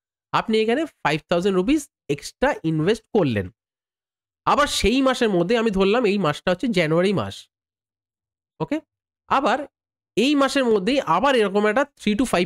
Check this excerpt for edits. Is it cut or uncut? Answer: uncut